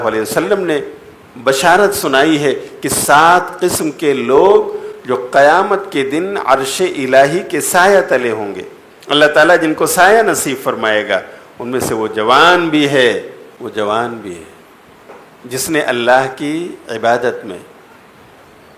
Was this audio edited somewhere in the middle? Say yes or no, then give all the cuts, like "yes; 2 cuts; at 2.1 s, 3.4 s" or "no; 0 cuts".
yes; 1 cut; at 13.4 s